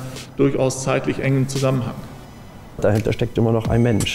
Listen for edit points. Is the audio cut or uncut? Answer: cut